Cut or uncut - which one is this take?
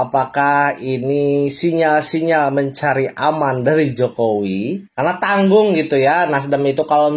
cut